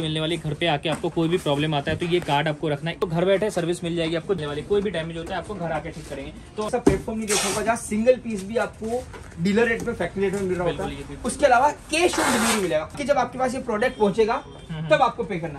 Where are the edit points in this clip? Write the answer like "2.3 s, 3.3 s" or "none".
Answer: 3.0 s, 4.4 s, 6.7 s, 13.0 s